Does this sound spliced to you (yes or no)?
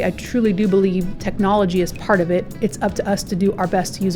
yes